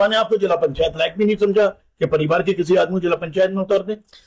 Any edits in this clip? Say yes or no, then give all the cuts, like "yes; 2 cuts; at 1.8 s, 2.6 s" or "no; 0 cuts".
no; 0 cuts